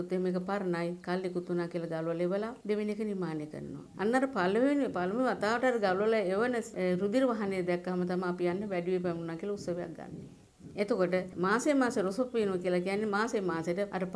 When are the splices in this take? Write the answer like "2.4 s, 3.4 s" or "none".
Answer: none